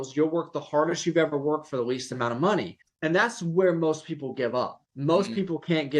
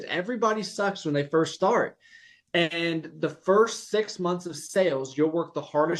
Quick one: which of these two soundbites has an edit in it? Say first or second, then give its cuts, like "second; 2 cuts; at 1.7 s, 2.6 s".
first; 2 cuts; at 2.8 s, 4.8 s